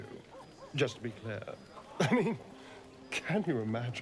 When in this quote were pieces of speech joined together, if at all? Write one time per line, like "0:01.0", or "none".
0:01.6